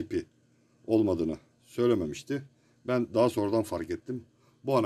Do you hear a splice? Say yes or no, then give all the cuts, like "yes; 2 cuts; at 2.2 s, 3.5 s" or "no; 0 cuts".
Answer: no; 0 cuts